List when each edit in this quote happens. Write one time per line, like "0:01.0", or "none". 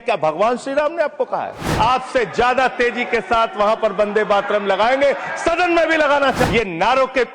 0:01.7
0:06.4

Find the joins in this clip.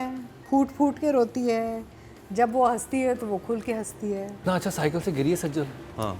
0:04.4

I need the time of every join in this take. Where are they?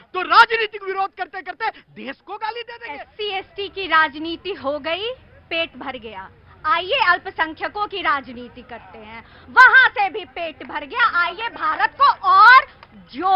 0:02.8

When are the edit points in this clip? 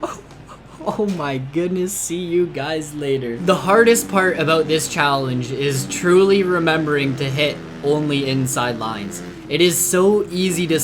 0:03.3

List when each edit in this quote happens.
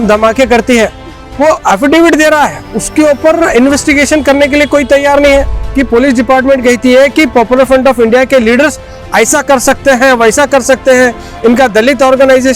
0:05.6

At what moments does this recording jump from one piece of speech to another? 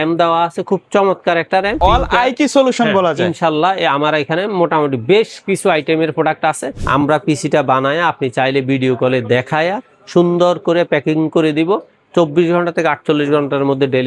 0:01.8
0:06.7

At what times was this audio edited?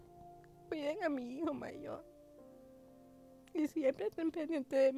0:02.0
0:03.5

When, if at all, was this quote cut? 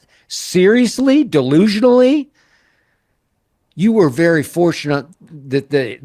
none

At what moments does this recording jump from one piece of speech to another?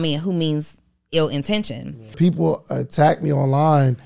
0:02.2

